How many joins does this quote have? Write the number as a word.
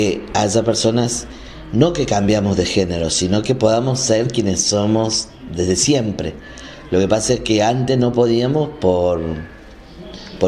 zero